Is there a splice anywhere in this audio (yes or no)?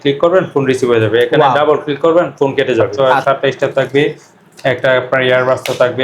yes